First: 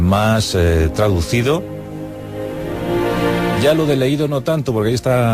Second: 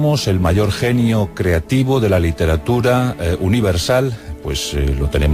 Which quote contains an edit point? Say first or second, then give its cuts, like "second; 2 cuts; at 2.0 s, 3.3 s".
first; 1 cut; at 4.2 s